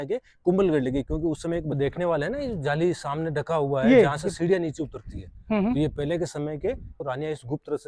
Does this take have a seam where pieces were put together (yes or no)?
yes